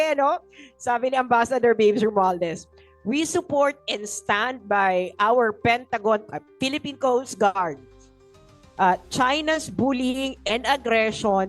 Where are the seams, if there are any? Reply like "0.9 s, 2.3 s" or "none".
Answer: none